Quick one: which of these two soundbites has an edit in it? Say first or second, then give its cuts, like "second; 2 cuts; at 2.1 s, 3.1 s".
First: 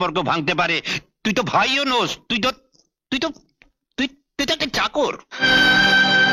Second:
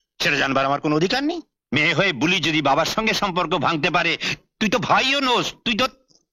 second; 1 cut; at 1.5 s